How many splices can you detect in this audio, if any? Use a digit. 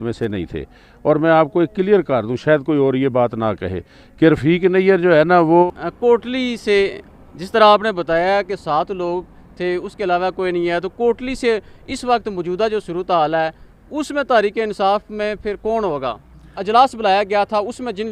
2